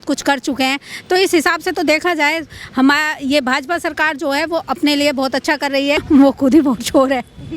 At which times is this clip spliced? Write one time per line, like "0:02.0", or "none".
0:06.0